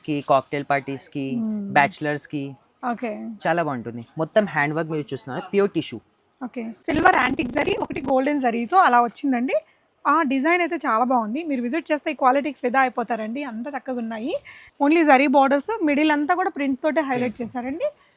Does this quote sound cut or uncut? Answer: cut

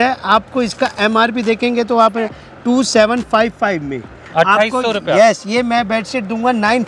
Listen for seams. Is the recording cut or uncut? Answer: uncut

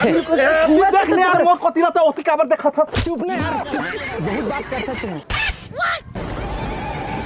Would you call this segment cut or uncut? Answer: uncut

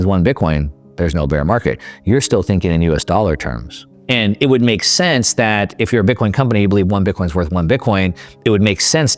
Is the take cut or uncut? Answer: cut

